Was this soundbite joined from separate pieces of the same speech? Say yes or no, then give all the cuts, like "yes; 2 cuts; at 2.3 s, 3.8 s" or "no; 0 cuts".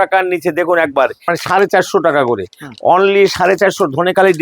yes; 1 cut; at 1.3 s